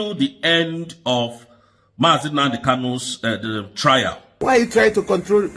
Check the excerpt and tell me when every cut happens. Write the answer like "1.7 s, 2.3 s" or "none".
4.2 s

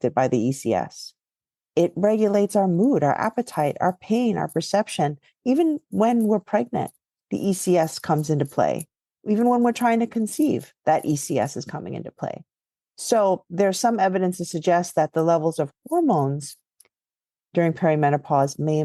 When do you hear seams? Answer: none

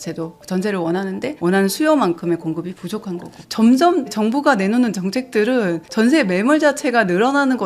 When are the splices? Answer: 1.4 s, 3.4 s, 4.1 s

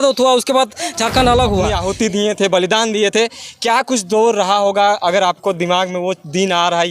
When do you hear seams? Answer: 1.7 s

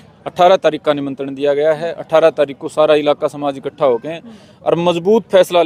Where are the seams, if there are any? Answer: none

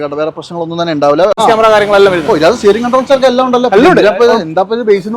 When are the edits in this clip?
1.4 s

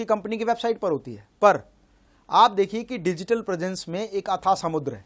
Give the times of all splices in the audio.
none

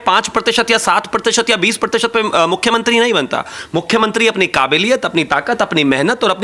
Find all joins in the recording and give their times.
none

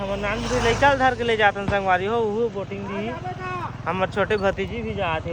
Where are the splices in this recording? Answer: none

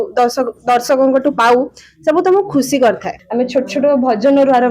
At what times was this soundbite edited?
3.1 s

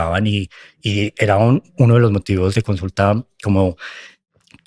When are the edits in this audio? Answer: none

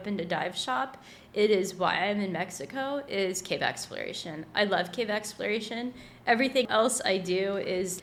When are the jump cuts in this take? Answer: none

